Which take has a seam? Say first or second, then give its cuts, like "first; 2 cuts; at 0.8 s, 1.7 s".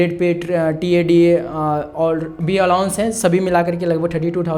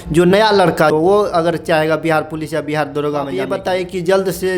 second; 2 cuts; at 0.9 s, 3.5 s